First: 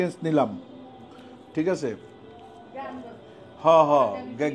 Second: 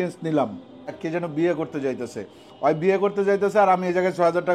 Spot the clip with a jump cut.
second; 1 cut; at 1.0 s

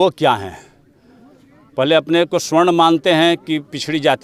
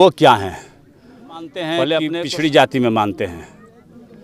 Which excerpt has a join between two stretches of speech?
second; 1 cut; at 2.2 s

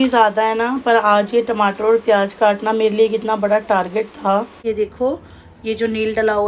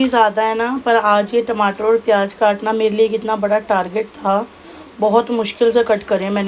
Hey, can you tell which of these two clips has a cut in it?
first; 1 cut; at 4.6 s

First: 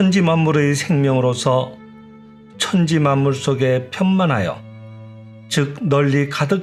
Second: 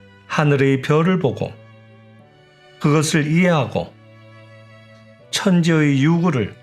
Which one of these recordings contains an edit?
second; 2 cuts; at 3.9 s, 5.3 s

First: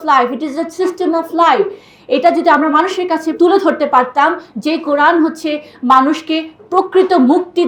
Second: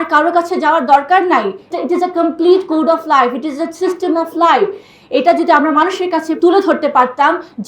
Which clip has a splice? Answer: second; 1 cut; at 1.7 s

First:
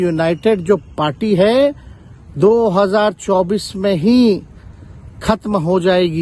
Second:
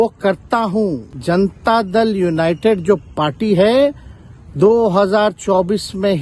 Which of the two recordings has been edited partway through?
second; 1 cut; at 1.1 s

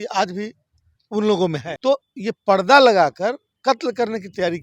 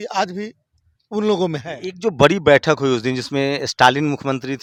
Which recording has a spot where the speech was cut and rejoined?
first; 2 cuts; at 1.7 s, 3.5 s

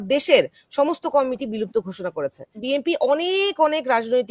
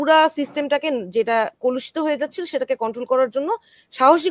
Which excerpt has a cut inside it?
first; 1 cut; at 2.6 s

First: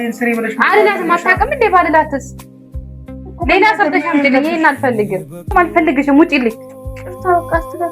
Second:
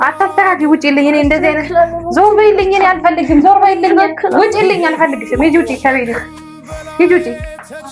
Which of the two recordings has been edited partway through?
first; 1 cut; at 5.5 s

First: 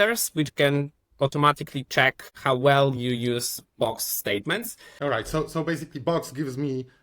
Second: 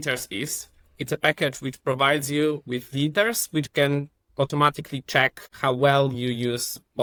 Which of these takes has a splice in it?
first; 1 cut; at 4.9 s

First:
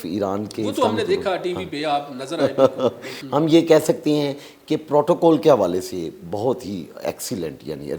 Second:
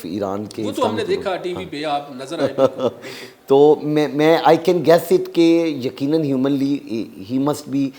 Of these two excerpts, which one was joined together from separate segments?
first; 1 cut; at 3.1 s

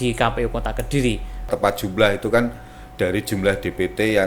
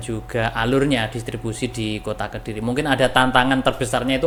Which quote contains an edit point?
first; 1 cut; at 1.5 s

